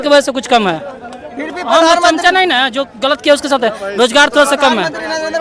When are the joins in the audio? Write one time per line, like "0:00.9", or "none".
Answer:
none